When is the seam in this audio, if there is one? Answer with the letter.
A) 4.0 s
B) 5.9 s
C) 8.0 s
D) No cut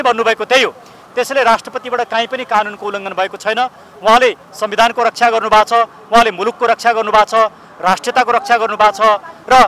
D